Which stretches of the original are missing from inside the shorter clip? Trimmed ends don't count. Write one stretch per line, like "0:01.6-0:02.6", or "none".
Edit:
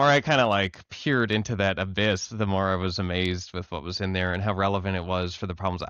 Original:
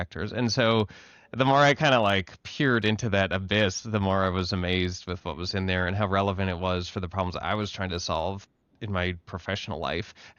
none